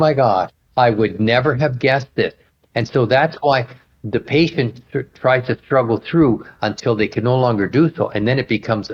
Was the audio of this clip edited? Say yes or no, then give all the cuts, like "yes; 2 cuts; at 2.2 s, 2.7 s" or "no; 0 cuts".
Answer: no; 0 cuts